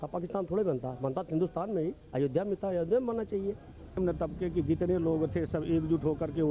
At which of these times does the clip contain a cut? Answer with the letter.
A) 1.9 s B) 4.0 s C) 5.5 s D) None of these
B